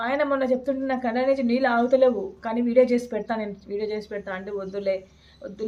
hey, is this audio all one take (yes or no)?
yes